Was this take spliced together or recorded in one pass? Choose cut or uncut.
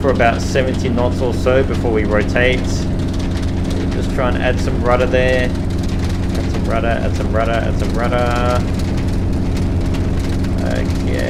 uncut